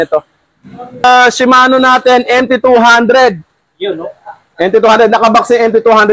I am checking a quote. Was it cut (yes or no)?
yes